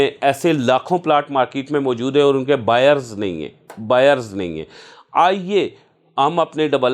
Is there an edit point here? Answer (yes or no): no